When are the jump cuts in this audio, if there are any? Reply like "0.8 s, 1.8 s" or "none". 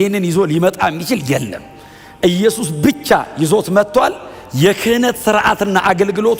none